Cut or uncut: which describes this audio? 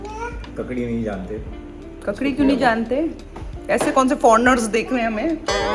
uncut